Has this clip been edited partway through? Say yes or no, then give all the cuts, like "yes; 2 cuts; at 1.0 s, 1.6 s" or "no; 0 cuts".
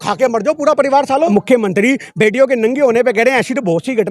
yes; 1 cut; at 1.3 s